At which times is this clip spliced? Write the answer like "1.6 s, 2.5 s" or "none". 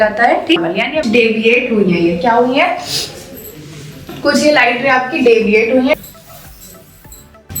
1.0 s, 6.0 s